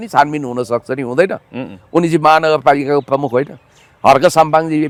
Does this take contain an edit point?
no; 0 cuts

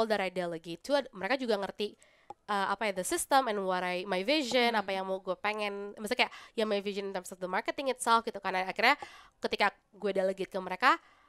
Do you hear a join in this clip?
no; 0 cuts

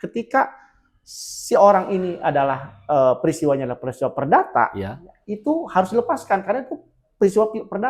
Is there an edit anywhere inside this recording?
no; 0 cuts

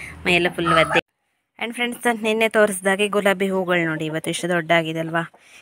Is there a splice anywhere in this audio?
yes; 1 cut; at 1.0 s

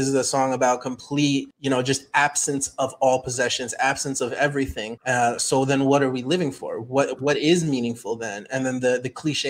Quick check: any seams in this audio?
yes; 2 cuts; at 1.5 s, 4.9 s

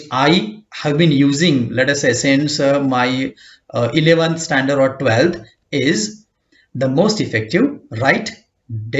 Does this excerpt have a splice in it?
no; 0 cuts

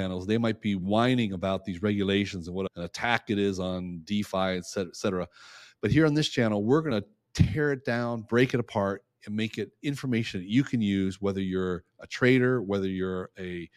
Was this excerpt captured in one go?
no; 2 cuts; at 2.8 s, 6.9 s

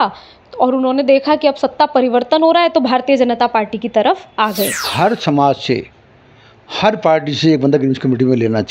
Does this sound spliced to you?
yes; 1 cut; at 4.9 s

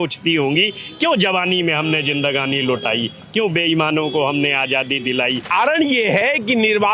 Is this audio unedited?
no; 1 cut; at 5.5 s

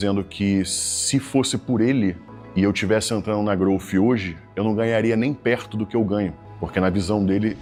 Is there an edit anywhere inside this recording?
no; 0 cuts

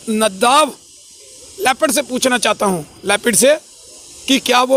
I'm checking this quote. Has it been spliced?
no; 0 cuts

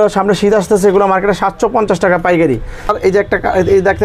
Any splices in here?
yes; 1 cut; at 2.9 s

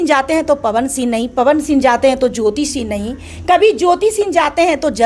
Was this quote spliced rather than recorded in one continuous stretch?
no; 0 cuts

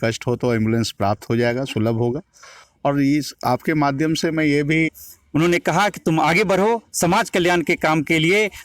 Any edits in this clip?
yes; 1 cut; at 4.9 s

